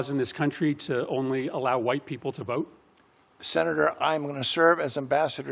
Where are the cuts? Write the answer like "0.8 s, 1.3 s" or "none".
none